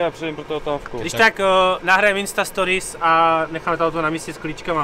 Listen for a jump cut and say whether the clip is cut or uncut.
uncut